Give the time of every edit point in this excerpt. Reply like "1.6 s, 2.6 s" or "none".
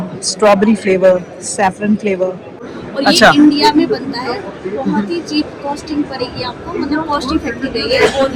2.7 s